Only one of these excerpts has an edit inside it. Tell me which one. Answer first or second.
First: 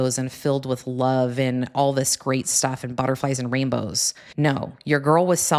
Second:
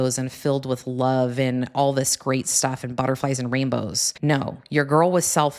second